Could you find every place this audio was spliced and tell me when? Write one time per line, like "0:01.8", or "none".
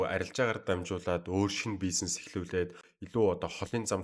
0:02.8